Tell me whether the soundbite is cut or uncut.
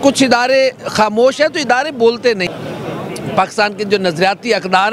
cut